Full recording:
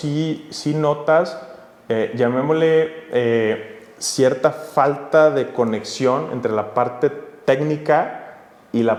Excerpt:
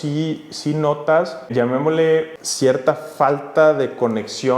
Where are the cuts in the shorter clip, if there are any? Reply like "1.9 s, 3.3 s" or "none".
1.5 s, 2.4 s